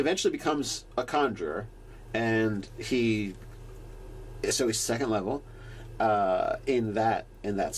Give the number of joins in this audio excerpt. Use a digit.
1